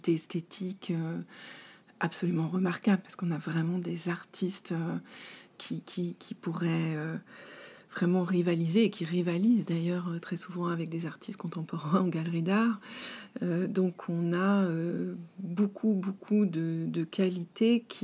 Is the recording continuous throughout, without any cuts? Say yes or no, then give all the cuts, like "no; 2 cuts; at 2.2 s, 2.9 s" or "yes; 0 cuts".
yes; 0 cuts